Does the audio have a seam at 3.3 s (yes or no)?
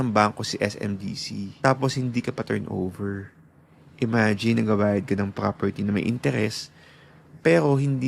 no